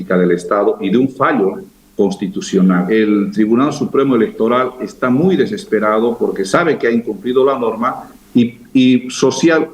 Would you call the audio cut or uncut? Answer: cut